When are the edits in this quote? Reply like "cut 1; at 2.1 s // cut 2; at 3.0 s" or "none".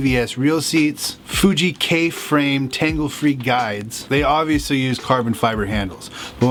none